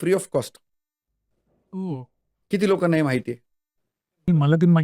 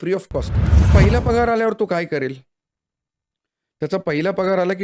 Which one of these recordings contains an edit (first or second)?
second